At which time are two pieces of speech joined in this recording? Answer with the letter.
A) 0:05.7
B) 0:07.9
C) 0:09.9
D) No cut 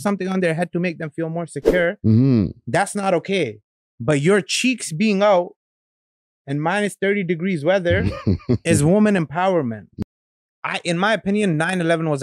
C